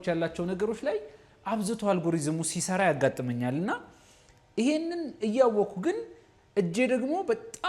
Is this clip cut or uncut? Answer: uncut